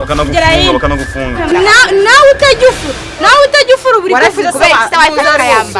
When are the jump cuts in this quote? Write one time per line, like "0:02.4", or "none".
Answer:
0:01.5